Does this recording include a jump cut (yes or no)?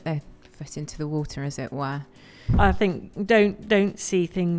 yes